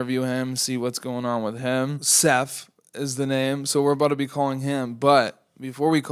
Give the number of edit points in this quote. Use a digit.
1